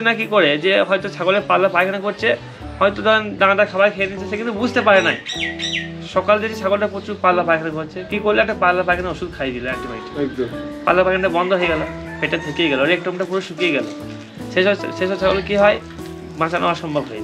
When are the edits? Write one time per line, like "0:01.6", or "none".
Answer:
none